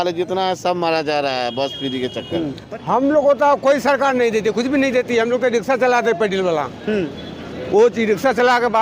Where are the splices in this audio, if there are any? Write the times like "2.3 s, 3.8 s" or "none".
2.6 s